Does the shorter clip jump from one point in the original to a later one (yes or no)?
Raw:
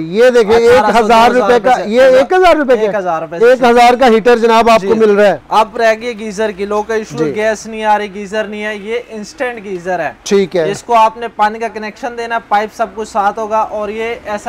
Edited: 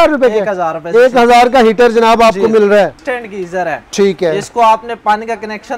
yes